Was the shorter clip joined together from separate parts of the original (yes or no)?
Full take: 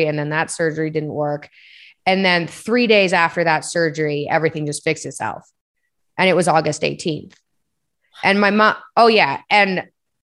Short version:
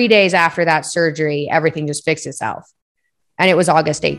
no